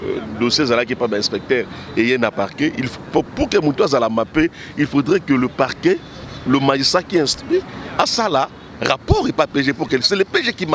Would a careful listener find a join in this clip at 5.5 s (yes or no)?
no